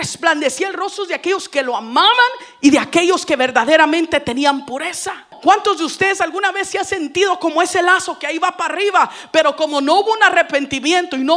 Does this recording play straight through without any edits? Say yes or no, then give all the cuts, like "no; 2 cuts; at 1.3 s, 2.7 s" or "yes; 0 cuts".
no; 1 cut; at 5.3 s